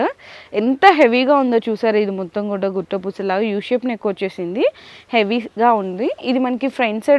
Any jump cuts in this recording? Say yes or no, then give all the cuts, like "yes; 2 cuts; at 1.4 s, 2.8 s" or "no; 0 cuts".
no; 0 cuts